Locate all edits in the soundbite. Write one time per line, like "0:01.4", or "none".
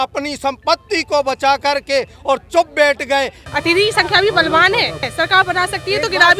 0:03.4
0:05.1